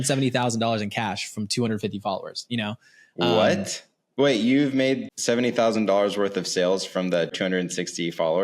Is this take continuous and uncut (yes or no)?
no